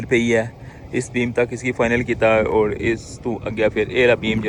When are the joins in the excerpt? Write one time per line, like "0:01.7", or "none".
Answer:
none